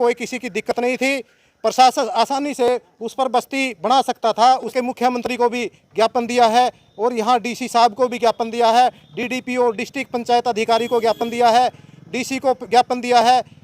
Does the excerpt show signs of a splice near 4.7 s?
yes; 1 cut; at 4.7 s

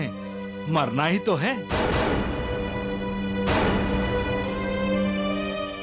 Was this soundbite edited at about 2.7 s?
no; 0 cuts

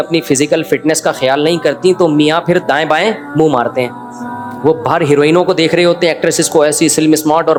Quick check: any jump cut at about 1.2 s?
no; 0 cuts

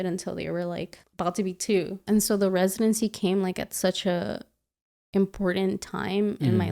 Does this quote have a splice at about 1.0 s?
yes; 2 cuts; at 1.0 s, 2.0 s

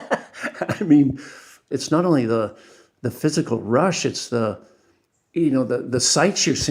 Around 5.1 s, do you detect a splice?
no; 1 cut; at 1.7 s

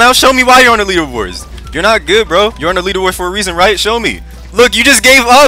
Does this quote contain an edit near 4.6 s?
no; 1 cut; at 2.6 s

